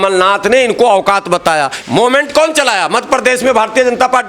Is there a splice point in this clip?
yes; 1 cut; at 1.8 s

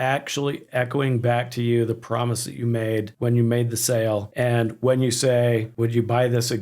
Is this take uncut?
no; 3 cuts; at 3.1 s, 4.3 s, 5.7 s

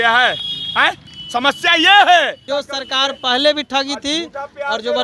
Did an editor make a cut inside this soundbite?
yes; 1 cut; at 2.4 s

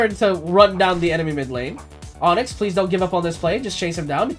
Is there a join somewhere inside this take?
no; 0 cuts

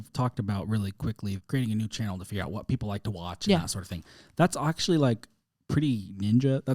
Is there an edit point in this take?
yes; 1 cut; at 1.4 s

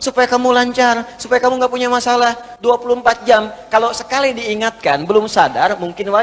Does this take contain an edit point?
no; 0 cuts

